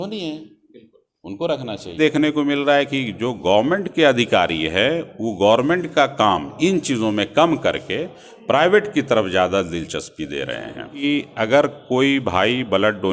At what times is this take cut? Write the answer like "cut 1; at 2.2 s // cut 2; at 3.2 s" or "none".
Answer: cut 1; at 2.0 s // cut 2; at 10.9 s